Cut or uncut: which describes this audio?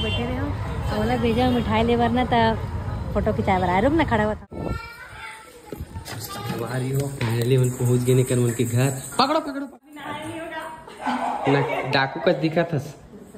cut